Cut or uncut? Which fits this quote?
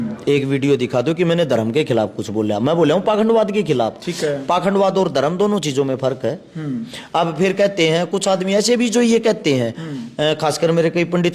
uncut